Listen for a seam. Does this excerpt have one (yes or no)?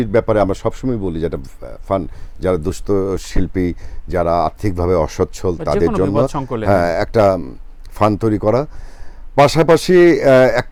no